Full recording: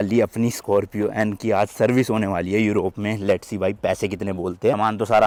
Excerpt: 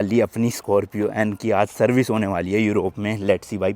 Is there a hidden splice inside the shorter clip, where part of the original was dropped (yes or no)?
no